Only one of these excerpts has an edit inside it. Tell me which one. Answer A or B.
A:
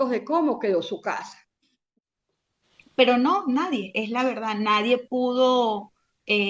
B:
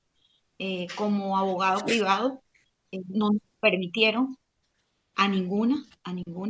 A